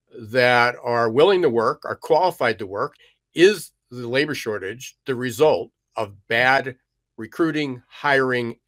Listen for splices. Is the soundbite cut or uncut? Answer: cut